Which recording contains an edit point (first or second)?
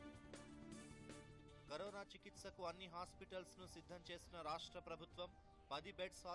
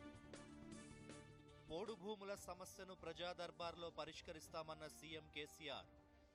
first